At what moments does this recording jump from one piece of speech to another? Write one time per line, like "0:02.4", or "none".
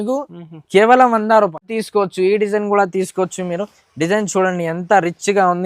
0:01.8